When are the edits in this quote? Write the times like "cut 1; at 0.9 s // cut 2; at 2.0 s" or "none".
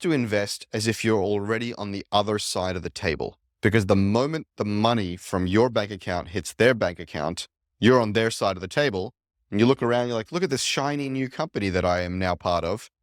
none